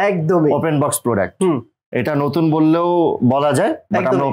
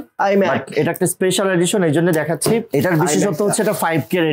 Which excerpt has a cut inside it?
second; 1 cut; at 2.7 s

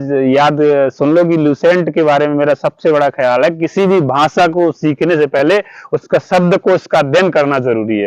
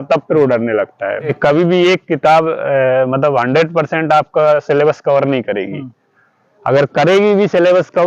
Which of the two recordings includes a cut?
second; 1 cut; at 1.3 s

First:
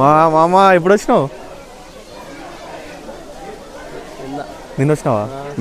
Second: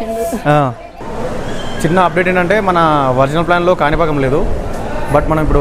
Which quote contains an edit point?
second; 1 cut; at 1.1 s

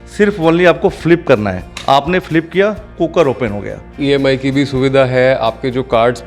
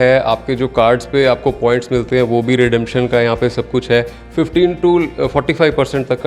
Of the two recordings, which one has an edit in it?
first; 1 cut; at 4.0 s

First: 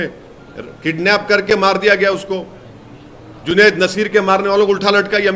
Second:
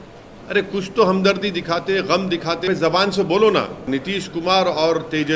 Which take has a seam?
second; 2 cuts; at 2.7 s, 3.9 s

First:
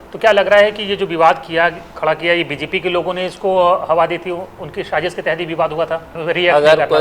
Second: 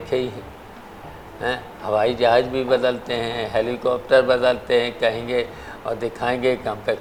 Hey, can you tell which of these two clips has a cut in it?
first; 1 cut; at 6.1 s

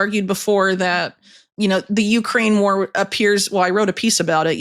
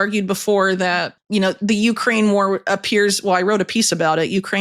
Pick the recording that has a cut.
second; 1 cut; at 1.1 s

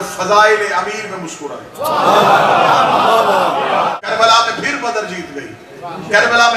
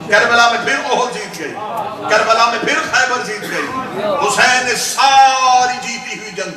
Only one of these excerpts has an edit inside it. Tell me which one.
first; 1 cut; at 4.0 s

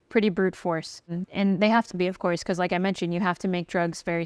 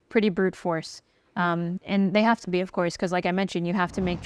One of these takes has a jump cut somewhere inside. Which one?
first; 1 cut; at 1.2 s

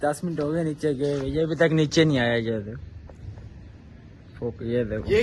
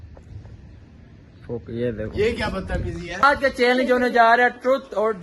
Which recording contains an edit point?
second; 1 cut; at 3.2 s

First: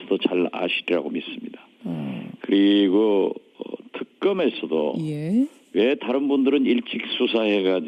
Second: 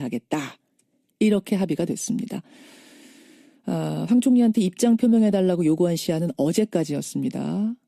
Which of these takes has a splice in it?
first; 1 cut; at 4.9 s

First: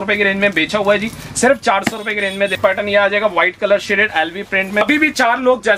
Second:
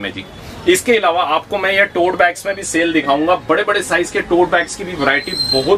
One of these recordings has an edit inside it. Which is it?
first; 2 cuts; at 2.6 s, 4.8 s

